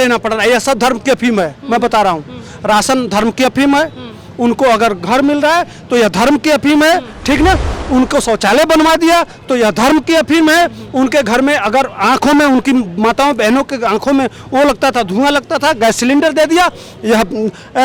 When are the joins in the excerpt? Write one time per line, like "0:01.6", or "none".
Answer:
none